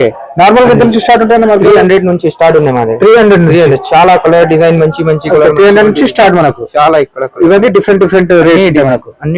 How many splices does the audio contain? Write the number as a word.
zero